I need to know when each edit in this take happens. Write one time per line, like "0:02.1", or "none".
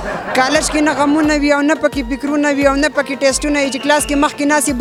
none